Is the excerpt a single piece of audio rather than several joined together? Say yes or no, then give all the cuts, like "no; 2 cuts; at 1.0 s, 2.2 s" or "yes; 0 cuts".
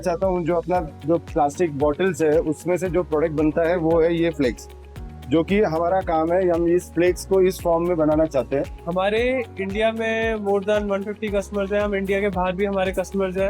no; 1 cut; at 8.8 s